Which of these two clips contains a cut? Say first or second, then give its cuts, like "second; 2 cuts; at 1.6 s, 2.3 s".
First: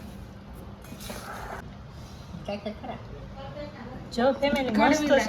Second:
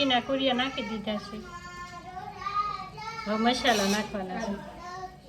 first; 1 cut; at 1.7 s